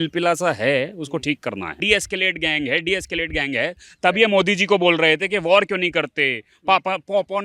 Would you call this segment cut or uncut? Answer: cut